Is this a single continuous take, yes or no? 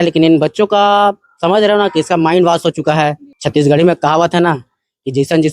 no